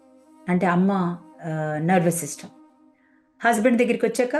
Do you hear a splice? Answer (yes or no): no